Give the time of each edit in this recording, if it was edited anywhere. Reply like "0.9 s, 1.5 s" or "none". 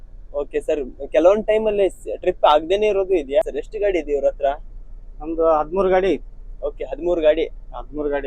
3.5 s